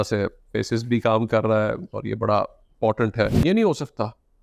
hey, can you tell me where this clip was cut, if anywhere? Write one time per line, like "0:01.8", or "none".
0:03.4